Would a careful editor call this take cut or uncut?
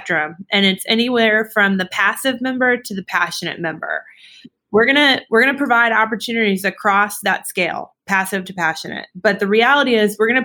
uncut